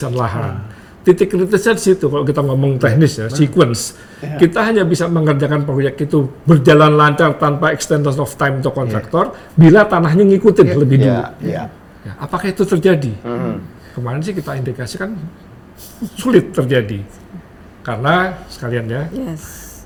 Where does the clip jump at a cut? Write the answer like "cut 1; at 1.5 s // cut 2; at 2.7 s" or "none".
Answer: none

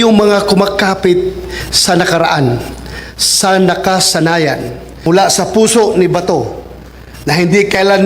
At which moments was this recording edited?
cut 1; at 5.1 s

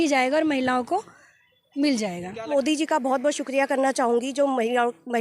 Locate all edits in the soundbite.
cut 1; at 2.5 s

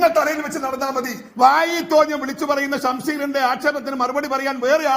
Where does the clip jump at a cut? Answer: cut 1; at 1.2 s

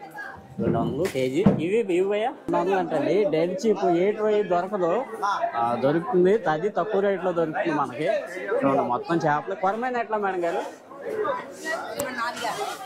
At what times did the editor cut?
cut 1; at 2.5 s

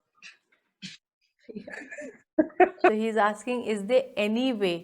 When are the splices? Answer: cut 1; at 2.9 s

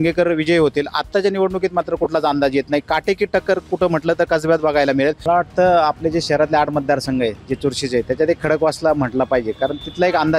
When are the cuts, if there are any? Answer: cut 1; at 5.2 s

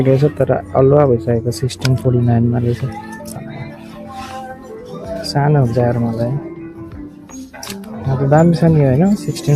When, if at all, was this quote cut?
cut 1; at 3.2 s

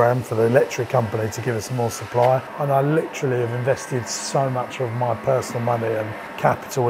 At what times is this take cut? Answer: cut 1; at 2.5 s

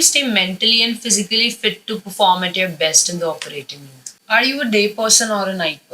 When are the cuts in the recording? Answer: cut 1; at 4.1 s

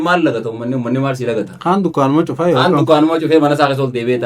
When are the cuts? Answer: none

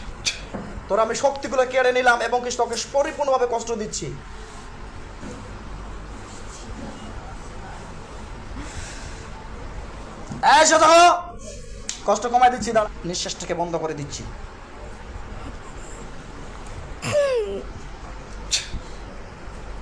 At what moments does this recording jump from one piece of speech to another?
cut 1; at 12.8 s

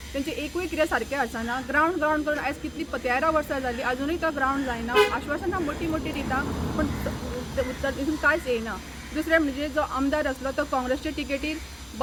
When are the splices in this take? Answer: none

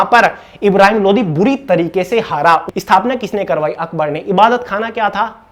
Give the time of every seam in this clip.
cut 1; at 2.6 s

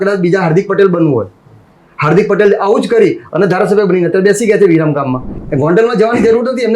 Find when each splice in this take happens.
cut 1; at 5.3 s

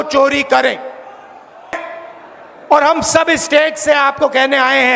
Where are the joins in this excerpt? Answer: cut 1; at 1.8 s

